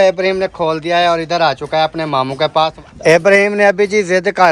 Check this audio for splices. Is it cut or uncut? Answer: cut